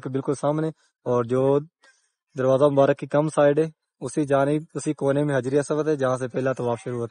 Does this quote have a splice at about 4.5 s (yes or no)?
no